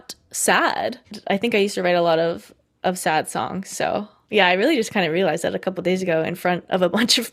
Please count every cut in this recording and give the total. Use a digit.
1